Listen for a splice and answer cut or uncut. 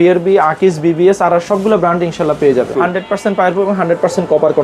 cut